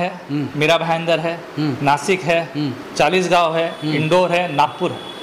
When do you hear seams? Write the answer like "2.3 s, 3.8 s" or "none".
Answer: none